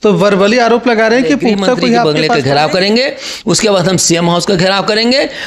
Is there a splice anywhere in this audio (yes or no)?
yes